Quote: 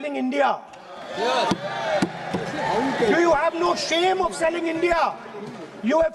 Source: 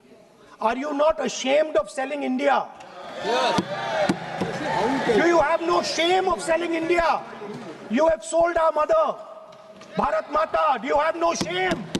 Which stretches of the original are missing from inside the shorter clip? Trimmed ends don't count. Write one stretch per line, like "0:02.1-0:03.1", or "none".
none